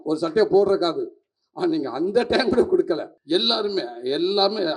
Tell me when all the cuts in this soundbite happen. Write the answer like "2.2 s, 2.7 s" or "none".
3.1 s